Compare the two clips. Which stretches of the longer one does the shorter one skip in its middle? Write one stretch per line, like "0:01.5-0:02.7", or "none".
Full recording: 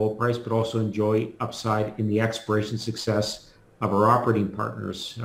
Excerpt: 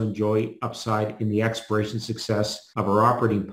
0:03.4-0:03.7